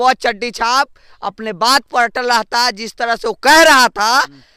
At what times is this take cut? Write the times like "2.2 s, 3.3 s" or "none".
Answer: none